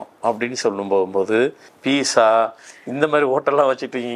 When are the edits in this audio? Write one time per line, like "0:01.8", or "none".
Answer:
0:01.7